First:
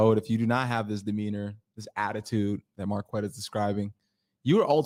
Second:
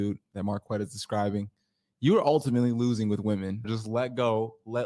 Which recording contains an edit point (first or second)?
second